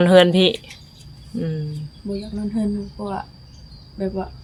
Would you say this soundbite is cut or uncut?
uncut